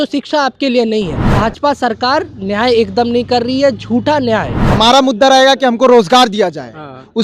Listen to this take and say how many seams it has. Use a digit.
2